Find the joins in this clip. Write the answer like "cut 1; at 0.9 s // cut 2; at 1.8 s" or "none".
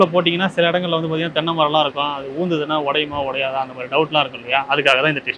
none